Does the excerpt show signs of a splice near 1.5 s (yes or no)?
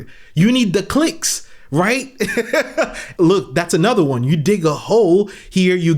no